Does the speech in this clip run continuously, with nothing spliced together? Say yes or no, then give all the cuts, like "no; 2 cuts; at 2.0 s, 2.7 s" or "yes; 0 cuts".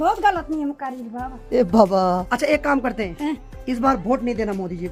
yes; 0 cuts